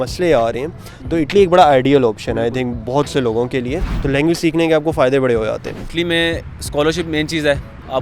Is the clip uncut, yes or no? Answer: no